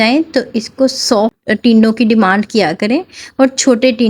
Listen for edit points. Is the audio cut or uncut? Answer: cut